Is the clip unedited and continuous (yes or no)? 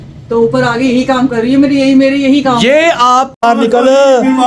no